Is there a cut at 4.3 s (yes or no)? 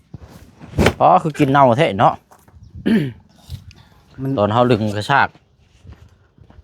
yes